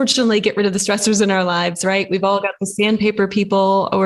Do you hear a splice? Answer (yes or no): no